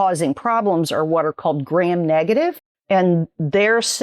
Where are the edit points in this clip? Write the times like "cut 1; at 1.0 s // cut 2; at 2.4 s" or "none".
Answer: cut 1; at 2.7 s

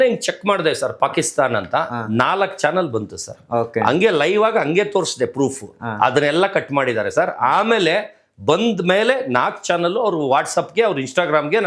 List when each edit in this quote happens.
none

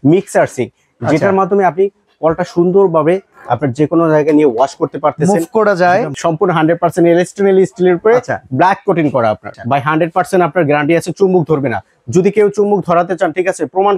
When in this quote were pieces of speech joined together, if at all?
cut 1; at 6.2 s // cut 2; at 9.5 s

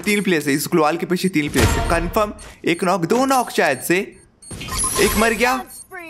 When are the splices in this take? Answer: none

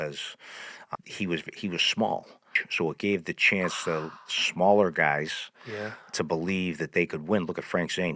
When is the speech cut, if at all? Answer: cut 1; at 0.9 s // cut 2; at 2.6 s

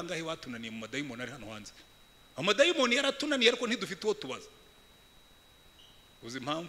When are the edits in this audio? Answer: none

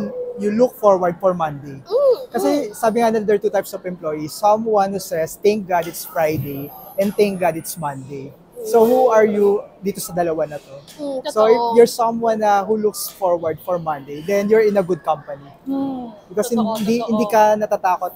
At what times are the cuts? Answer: none

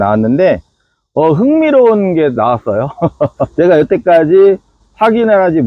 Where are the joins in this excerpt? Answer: cut 1; at 3.5 s

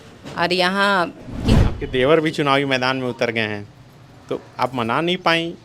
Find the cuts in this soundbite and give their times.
cut 1; at 1.6 s

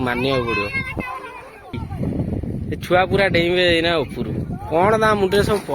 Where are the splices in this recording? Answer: cut 1; at 1.8 s

